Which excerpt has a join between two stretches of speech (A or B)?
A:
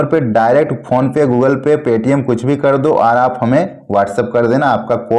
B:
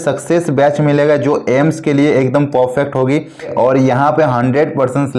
B